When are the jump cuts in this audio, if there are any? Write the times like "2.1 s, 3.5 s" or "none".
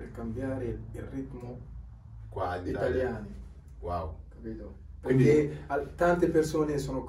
none